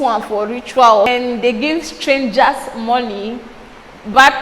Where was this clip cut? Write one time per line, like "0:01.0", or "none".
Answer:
0:01.1